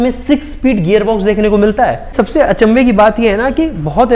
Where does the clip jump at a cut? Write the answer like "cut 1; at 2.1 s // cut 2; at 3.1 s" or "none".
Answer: cut 1; at 2.1 s